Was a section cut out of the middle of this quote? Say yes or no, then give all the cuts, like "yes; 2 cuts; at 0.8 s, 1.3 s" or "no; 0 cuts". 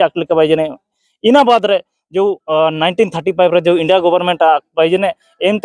no; 0 cuts